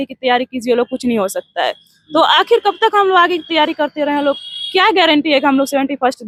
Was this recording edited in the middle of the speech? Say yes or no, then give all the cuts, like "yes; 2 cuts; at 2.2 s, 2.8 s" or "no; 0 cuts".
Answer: no; 0 cuts